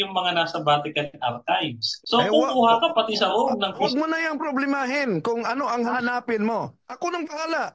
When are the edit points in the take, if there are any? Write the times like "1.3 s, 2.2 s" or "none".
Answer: 1.9 s, 3.8 s, 5.9 s, 6.8 s